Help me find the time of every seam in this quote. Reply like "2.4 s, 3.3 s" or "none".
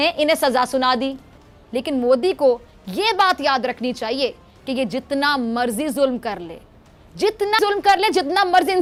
none